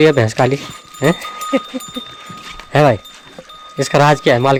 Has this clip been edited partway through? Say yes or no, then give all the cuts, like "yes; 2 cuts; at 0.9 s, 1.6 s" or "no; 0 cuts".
no; 0 cuts